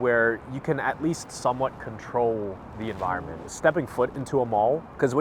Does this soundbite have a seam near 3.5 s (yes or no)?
yes